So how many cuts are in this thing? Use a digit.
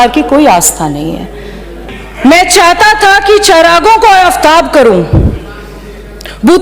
1